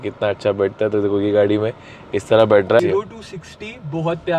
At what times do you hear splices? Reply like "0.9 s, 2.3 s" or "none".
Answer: 2.8 s